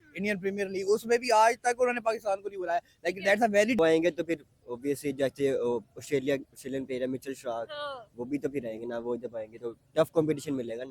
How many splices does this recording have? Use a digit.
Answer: 1